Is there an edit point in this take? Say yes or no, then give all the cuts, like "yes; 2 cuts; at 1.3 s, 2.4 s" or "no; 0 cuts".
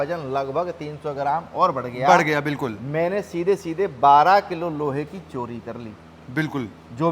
no; 0 cuts